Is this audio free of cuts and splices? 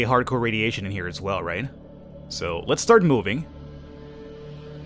yes; 0 cuts

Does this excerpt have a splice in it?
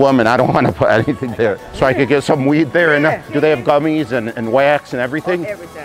yes; 2 cuts; at 1.7 s, 3.3 s

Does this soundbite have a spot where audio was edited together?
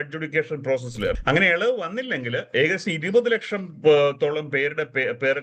yes; 1 cut; at 1.2 s

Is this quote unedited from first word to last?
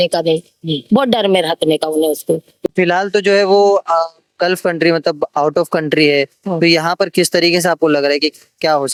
yes; 0 cuts

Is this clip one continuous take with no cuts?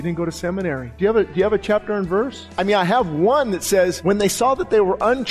no; 3 cuts; at 0.9 s, 2.4 s, 4.0 s

